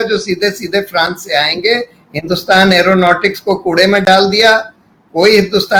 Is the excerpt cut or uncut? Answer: uncut